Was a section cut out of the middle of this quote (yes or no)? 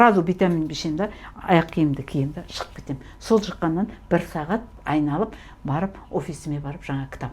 yes